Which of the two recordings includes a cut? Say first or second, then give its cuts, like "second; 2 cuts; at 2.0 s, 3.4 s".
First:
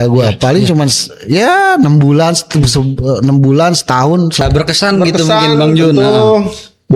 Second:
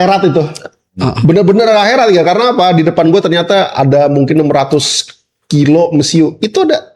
first; 1 cut; at 4.4 s